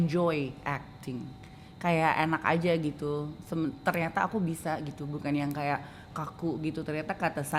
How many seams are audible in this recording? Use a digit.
0